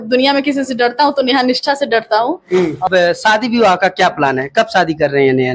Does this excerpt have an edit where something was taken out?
yes; 1 cut; at 2.8 s

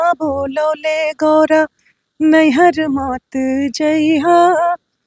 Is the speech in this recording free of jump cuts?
yes; 0 cuts

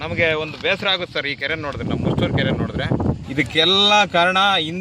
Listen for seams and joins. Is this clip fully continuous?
no; 1 cut; at 3.2 s

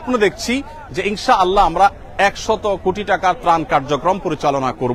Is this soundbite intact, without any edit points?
yes; 0 cuts

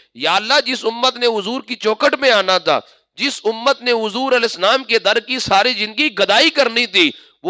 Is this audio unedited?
yes; 0 cuts

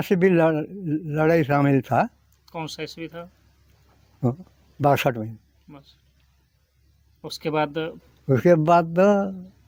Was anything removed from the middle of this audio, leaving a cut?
no; 0 cuts

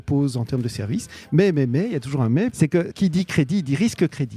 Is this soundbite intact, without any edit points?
no; 1 cut; at 2.9 s

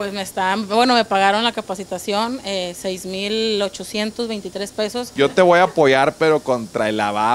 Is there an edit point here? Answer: yes; 1 cut; at 5.1 s

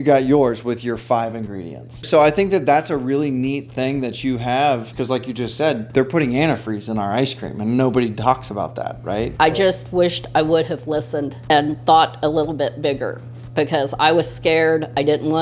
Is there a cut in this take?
yes; 5 cuts; at 2.0 s, 4.9 s, 5.8 s, 9.3 s, 11.5 s

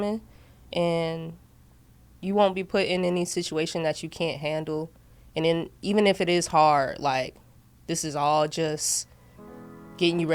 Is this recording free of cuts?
yes; 0 cuts

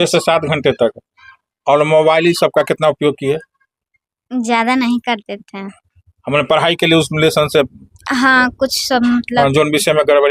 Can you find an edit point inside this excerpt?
no; 0 cuts

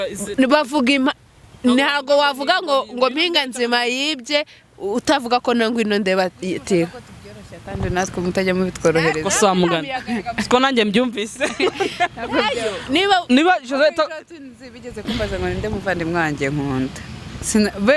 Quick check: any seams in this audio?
no; 0 cuts

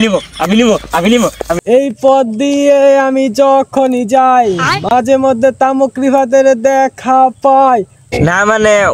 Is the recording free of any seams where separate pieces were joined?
no; 2 cuts; at 1.6 s, 8.1 s

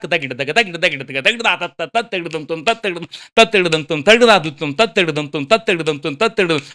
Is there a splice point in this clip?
no; 0 cuts

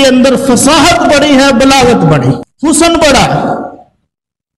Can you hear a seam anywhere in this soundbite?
yes; 1 cut; at 2.5 s

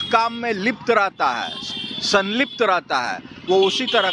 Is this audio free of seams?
yes; 0 cuts

